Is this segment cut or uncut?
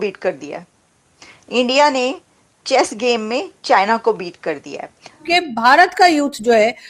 cut